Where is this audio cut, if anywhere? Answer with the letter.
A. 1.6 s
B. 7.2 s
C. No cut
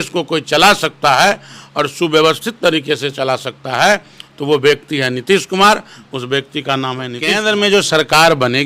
B